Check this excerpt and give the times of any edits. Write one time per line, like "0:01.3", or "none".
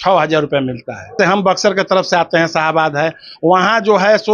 0:01.1